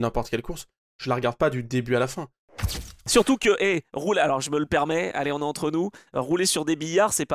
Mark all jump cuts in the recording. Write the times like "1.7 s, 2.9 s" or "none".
2.6 s